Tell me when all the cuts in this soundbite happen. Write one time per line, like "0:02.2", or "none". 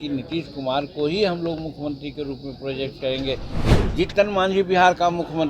0:03.7